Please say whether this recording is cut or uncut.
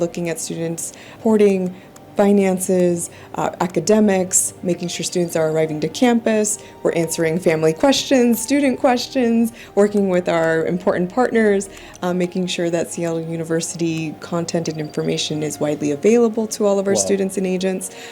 cut